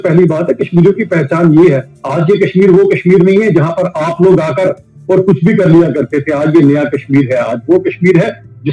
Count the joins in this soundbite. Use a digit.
1